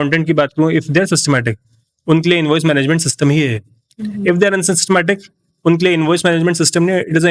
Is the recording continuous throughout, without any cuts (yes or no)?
yes